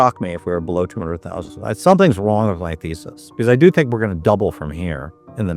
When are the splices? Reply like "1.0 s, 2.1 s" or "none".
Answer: none